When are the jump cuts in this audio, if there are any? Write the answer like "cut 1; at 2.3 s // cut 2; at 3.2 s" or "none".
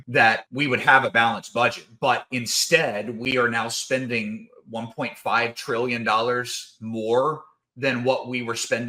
none